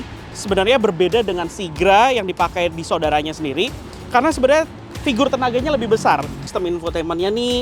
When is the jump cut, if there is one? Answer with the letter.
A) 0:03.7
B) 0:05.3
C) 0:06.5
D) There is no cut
C